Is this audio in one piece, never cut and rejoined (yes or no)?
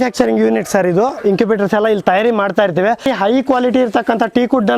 no